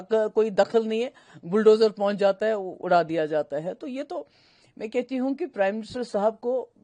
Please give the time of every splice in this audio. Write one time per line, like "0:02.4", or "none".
none